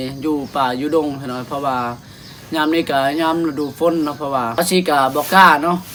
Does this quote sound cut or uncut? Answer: uncut